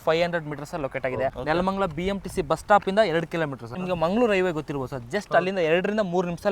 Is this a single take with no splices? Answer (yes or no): no